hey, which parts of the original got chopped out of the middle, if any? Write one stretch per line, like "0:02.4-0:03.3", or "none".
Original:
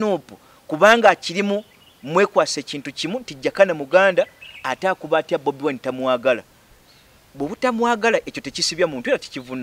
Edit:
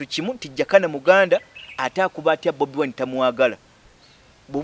none